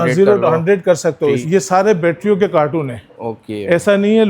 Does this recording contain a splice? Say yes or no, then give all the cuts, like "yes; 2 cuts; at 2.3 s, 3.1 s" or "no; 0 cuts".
yes; 1 cut; at 1.4 s